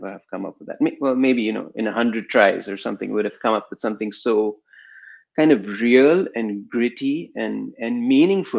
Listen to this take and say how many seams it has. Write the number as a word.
zero